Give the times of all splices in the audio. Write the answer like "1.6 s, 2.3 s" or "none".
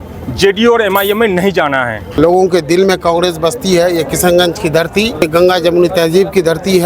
2.2 s